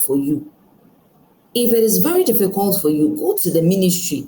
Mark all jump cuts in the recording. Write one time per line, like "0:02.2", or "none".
none